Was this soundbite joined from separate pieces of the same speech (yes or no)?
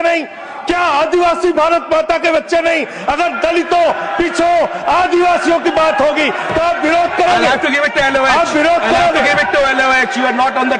no